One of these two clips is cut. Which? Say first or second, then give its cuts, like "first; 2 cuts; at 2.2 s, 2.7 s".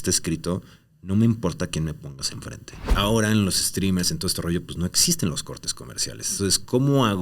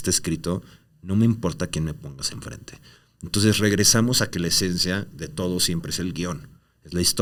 first; 2 cuts; at 2.9 s, 6.3 s